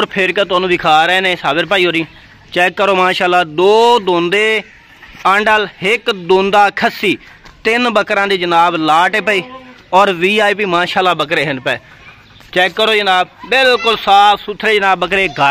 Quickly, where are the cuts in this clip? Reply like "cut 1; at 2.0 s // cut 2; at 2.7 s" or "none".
none